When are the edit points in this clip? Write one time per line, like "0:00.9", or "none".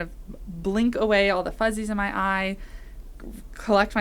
none